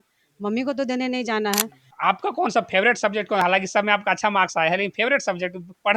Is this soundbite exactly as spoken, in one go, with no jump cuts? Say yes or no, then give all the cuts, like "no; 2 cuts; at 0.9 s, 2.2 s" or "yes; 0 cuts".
no; 1 cut; at 1.8 s